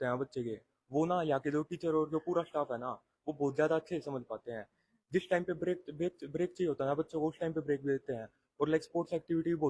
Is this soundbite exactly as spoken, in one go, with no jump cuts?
yes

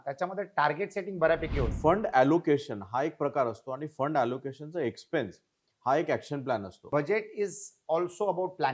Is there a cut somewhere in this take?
yes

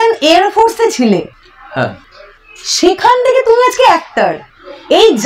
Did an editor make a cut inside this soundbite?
no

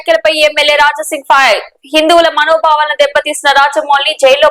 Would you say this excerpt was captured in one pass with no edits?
yes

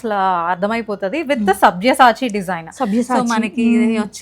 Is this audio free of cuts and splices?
yes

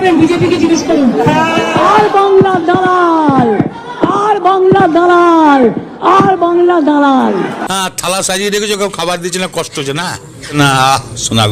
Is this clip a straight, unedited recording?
no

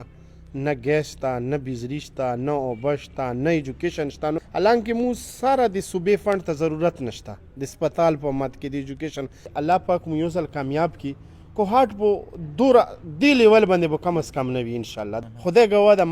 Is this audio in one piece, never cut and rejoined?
no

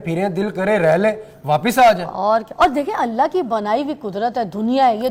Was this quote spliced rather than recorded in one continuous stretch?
no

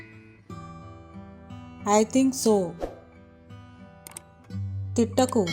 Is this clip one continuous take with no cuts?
no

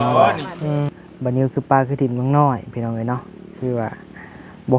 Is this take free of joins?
no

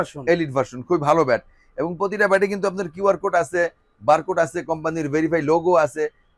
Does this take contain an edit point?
no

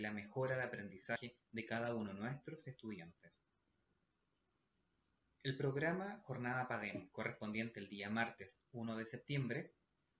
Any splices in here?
yes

